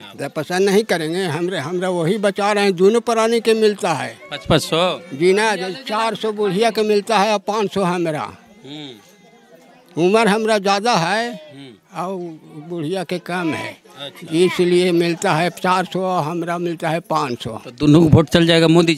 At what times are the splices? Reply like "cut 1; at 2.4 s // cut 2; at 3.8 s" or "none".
none